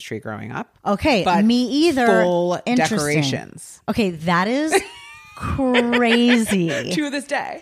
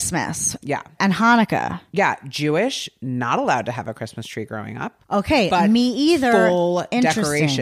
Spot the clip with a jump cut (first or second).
second